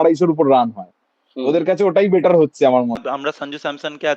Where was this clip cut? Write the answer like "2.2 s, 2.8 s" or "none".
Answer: 3.0 s